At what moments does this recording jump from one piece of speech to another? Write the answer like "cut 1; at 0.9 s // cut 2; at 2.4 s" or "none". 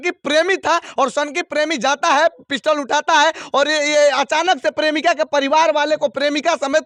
none